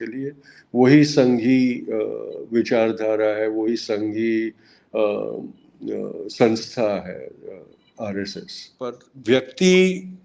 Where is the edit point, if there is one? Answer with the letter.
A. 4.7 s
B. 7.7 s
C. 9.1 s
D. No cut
C